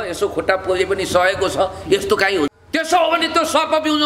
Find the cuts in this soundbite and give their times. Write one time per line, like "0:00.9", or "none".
0:02.5

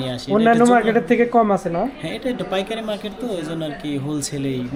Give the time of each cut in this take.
none

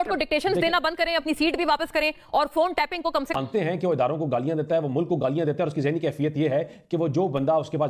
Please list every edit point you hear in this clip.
0:03.3

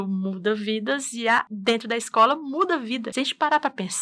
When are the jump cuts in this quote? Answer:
0:01.5
0:03.1

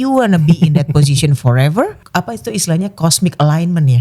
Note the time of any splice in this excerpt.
0:02.0

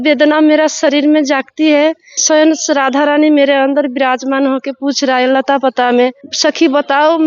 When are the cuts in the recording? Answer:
0:02.2
0:06.3

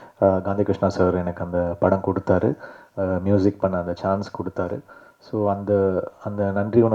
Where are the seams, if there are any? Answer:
none

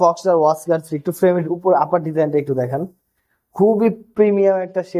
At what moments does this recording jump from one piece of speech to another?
none

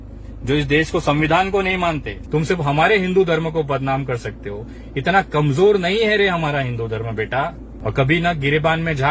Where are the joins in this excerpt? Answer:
0:02.2
0:07.7

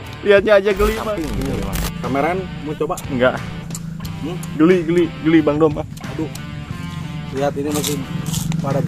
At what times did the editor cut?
0:01.1

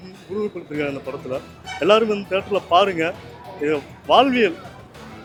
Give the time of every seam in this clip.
none

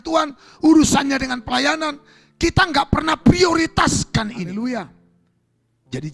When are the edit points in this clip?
0:04.5

